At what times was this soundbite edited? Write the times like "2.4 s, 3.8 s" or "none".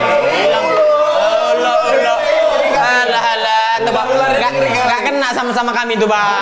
none